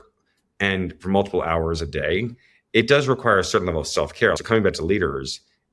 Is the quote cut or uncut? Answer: cut